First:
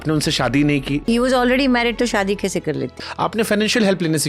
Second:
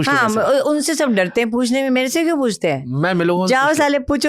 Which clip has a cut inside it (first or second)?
first